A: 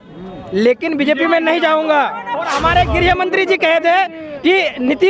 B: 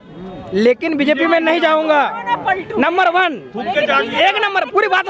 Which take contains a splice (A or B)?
A